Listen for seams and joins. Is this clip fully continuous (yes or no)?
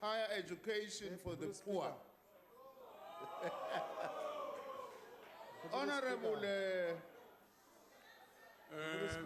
no